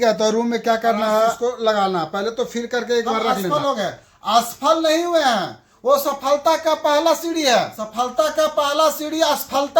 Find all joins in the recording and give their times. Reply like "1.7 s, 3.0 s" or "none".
1.4 s, 3.5 s, 7.8 s